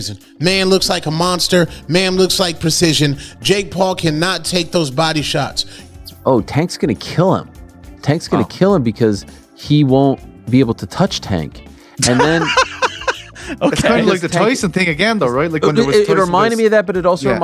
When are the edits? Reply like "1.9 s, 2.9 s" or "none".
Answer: 5.8 s